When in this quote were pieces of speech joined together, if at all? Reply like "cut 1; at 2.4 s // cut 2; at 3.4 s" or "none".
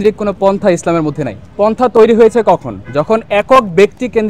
cut 1; at 1.4 s